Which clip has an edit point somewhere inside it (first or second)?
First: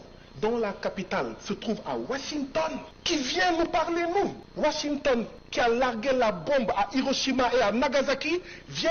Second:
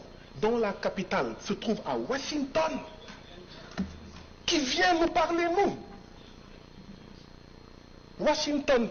first